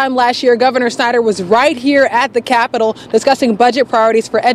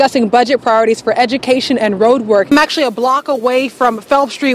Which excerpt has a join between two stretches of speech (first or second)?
second